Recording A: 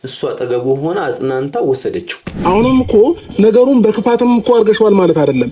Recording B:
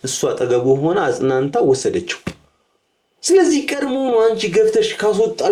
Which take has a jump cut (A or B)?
A